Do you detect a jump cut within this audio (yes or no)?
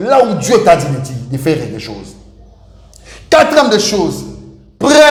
no